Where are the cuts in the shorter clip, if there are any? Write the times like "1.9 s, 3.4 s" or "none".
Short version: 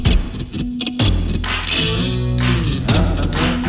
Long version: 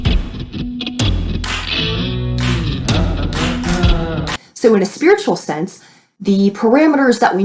none